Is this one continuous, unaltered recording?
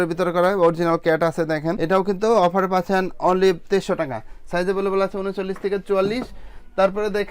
yes; 0 cuts

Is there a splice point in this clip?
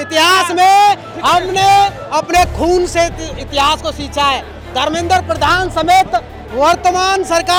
no; 0 cuts

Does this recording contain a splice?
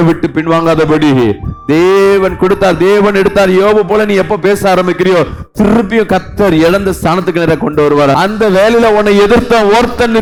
no; 0 cuts

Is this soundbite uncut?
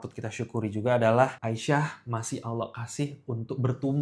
no; 1 cut; at 1.4 s

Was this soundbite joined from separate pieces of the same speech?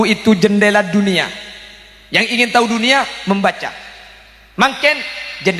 no; 0 cuts

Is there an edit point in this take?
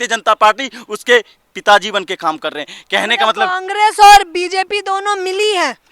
no; 0 cuts

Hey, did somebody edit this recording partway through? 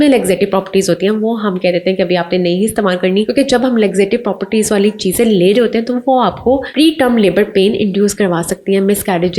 yes; 2 cuts; at 3.3 s, 6.7 s

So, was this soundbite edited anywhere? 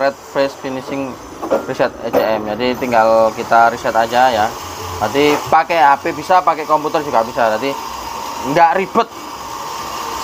no; 0 cuts

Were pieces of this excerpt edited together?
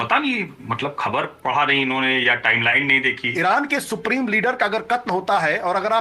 yes; 1 cut; at 3.3 s

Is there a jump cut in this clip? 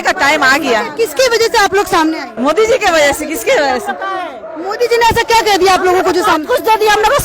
yes; 1 cut; at 2.3 s

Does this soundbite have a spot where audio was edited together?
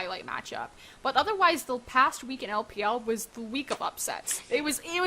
yes; 1 cut; at 3.7 s

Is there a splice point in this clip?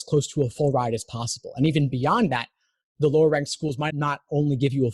yes; 1 cut; at 3.9 s

